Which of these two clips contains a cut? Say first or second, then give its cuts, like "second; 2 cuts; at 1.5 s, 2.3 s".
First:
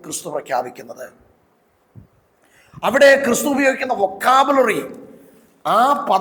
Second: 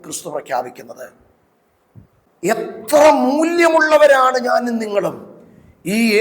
second; 1 cut; at 2.2 s